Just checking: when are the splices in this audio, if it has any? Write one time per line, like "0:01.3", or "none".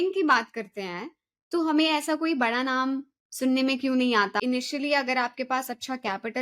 0:04.3